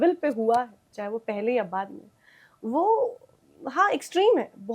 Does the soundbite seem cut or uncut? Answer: uncut